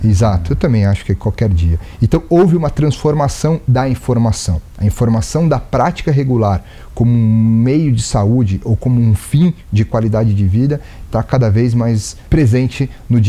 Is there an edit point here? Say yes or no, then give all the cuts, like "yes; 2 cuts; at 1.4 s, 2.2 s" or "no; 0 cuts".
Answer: yes; 1 cut; at 12.1 s